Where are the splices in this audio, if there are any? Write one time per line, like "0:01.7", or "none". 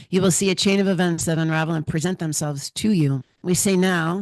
0:01.2
0:03.3